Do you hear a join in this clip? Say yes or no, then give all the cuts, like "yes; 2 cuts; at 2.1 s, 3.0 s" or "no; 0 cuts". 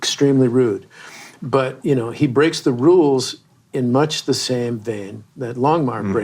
no; 0 cuts